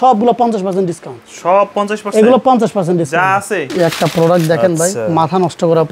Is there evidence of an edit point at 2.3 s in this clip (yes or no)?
no